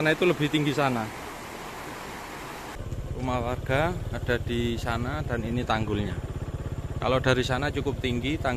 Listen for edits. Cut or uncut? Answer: cut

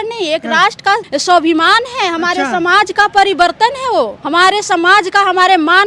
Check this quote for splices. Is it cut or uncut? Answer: cut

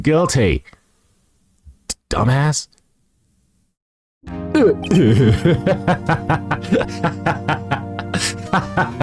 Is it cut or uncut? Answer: uncut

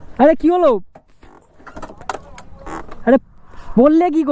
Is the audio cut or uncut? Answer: uncut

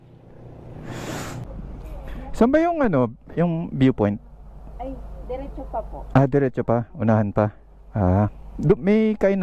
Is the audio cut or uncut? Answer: cut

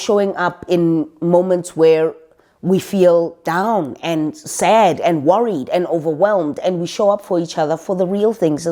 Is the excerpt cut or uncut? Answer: uncut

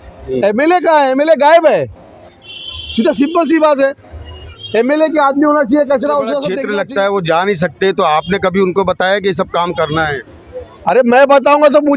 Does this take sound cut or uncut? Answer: cut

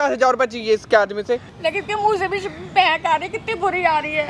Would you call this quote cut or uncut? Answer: cut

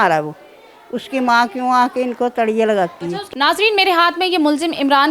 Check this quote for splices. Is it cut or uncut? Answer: cut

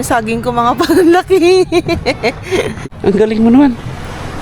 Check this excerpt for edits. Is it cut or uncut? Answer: cut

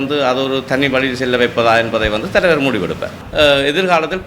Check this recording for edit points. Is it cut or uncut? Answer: cut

